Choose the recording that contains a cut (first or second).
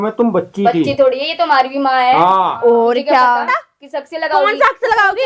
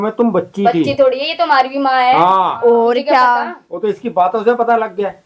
first